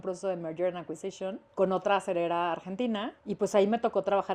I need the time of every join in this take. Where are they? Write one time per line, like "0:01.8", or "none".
0:01.4
0:03.2